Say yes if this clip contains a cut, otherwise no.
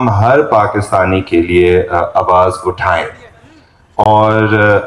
no